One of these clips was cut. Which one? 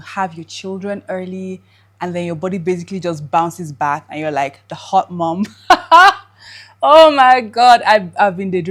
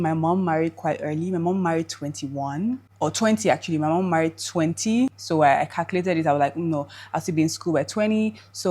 second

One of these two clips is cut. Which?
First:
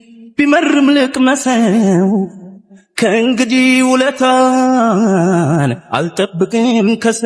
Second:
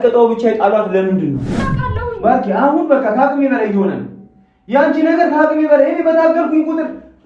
second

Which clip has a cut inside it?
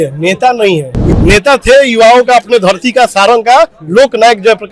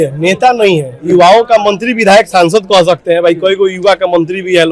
first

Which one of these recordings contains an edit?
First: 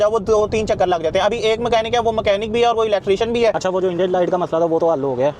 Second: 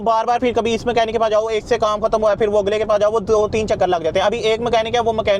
first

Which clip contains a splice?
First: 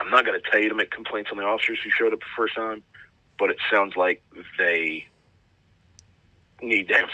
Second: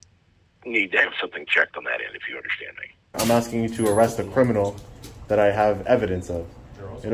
second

